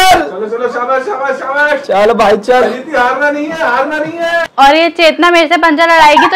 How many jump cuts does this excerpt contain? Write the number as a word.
one